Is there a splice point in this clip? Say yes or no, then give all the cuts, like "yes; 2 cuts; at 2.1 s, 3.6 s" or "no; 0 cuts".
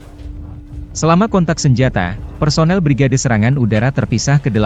no; 0 cuts